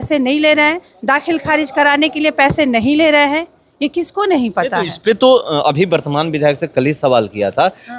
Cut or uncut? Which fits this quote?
uncut